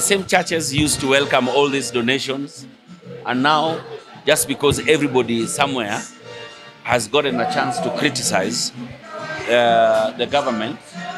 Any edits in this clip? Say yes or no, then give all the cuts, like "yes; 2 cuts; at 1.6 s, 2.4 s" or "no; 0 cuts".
no; 0 cuts